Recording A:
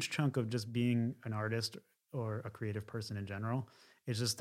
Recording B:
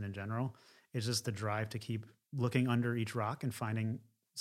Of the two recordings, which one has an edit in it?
B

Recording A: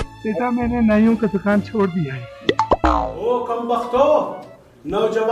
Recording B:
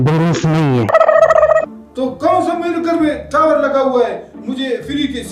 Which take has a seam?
A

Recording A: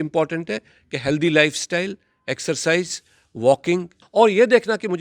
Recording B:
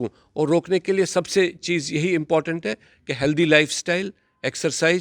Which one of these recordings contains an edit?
A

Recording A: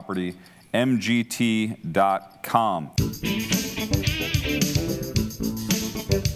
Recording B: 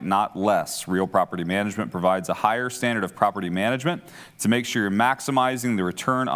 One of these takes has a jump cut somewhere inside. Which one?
A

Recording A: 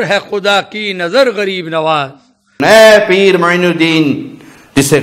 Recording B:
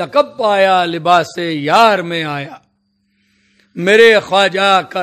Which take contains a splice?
A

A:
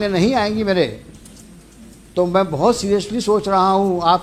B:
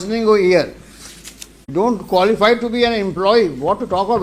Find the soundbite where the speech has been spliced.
B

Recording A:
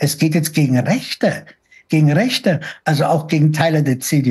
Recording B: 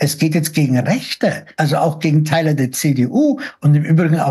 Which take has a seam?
B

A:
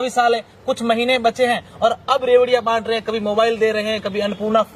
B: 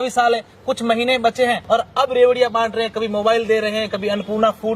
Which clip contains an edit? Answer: B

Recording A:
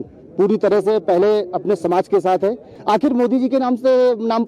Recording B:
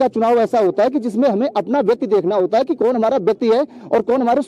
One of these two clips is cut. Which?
A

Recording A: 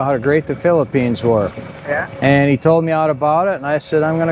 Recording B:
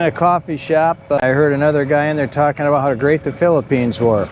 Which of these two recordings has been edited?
B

